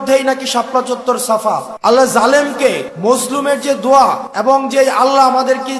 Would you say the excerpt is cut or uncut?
cut